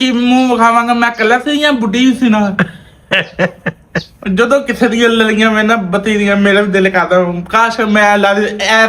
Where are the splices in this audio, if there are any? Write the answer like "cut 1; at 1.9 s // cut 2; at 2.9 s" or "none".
cut 1; at 4.1 s